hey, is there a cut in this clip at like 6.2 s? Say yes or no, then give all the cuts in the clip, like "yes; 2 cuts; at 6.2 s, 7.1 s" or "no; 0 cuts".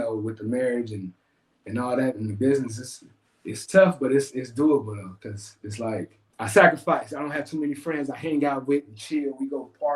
yes; 1 cut; at 6.2 s